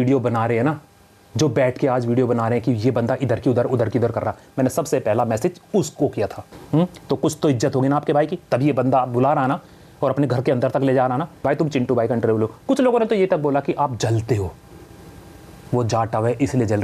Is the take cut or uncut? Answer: cut